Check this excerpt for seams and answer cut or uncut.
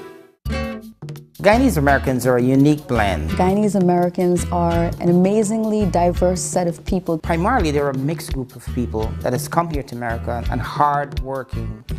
cut